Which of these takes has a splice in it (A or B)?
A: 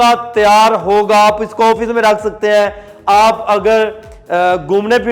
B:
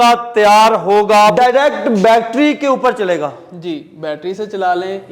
B